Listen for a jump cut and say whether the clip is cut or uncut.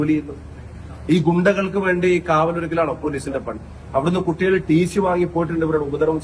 cut